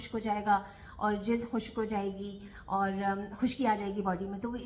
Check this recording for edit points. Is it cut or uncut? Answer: uncut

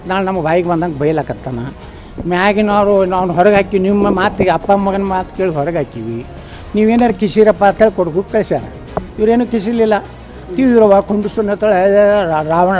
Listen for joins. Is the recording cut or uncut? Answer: uncut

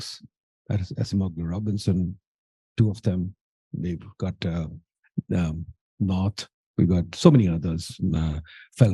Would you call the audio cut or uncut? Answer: uncut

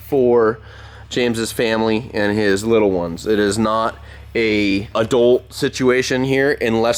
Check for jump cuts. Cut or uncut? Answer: uncut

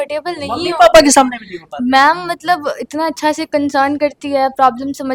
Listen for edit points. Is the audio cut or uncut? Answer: uncut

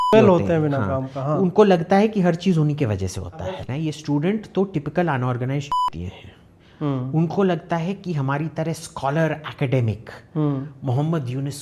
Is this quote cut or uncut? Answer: cut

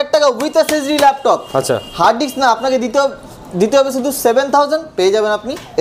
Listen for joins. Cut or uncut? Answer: uncut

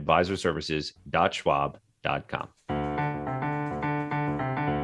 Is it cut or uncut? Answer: cut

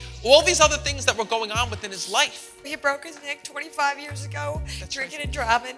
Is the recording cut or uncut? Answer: cut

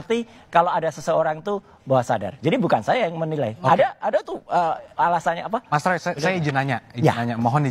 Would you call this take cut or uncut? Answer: cut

